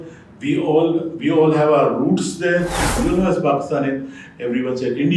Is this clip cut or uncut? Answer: cut